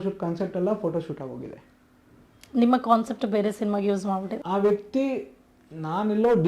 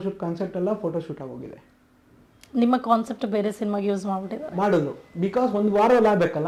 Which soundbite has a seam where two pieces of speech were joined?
first; 1 cut; at 4.4 s

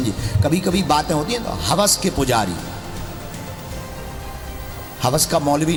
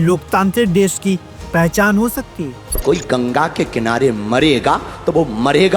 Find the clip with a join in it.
second; 1 cut; at 2.8 s

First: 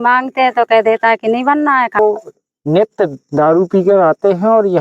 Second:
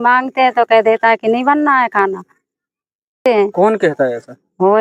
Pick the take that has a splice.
first; 1 cut; at 2.0 s

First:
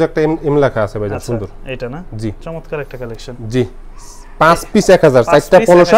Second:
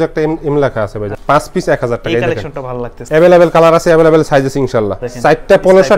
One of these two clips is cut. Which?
second; 3 cuts; at 1.2 s, 3.0 s, 5.0 s

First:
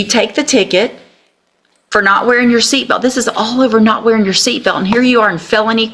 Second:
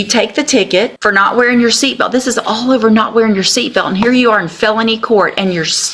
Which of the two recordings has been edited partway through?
second; 1 cut; at 1.0 s

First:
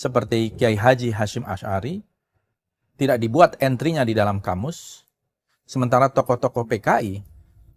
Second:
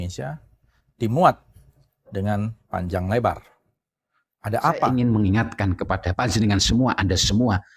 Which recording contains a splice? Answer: second; 1 cut; at 4.8 s

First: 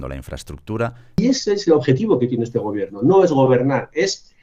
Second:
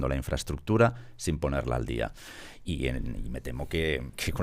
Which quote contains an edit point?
first; 1 cut; at 1.2 s

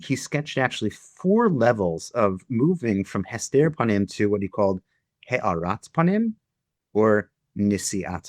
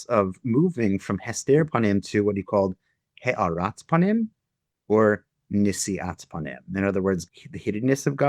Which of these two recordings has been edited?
second; 1 cut; at 7.3 s

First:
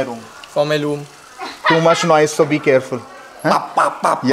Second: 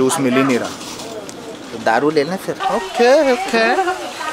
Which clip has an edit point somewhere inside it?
second; 1 cut; at 2.5 s

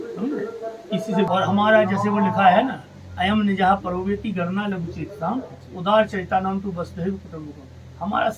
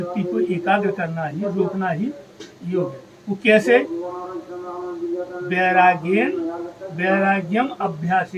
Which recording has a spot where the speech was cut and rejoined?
first; 1 cut; at 1.3 s

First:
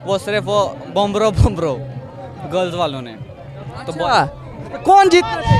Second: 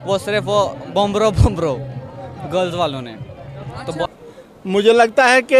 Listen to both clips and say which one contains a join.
second; 1 cut; at 4.1 s

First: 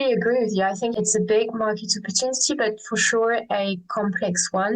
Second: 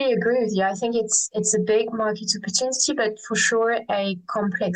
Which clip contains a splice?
first; 1 cut; at 0.9 s

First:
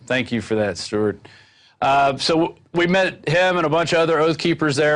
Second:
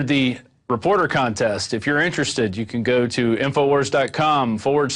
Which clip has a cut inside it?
second; 1 cut; at 1.4 s

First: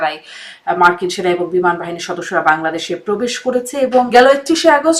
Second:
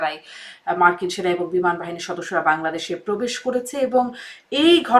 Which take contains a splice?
first; 1 cut; at 4.1 s

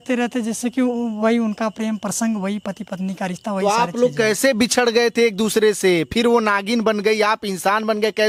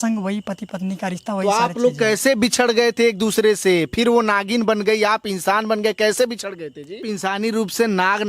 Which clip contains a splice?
second; 1 cut; at 7.0 s

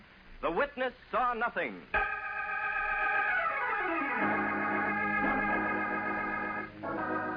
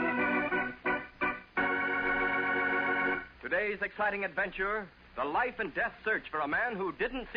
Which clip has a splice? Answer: first; 1 cut; at 1.0 s

